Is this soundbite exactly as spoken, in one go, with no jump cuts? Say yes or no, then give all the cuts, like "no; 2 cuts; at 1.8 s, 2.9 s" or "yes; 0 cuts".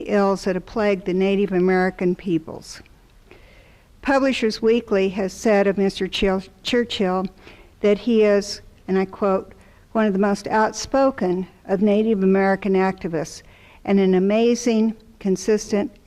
no; 1 cut; at 5.8 s